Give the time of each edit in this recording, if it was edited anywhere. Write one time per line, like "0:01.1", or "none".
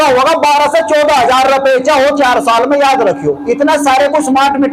none